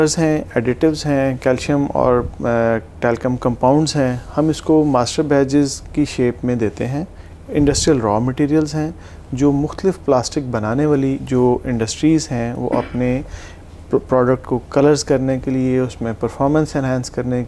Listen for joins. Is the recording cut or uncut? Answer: uncut